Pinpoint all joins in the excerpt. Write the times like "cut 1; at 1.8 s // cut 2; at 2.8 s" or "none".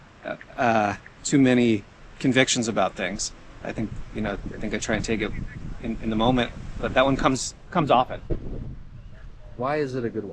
cut 1; at 8.4 s